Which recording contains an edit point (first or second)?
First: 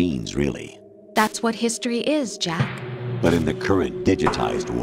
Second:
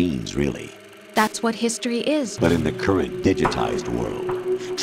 second